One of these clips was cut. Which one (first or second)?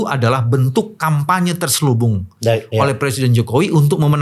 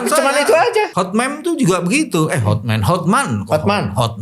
second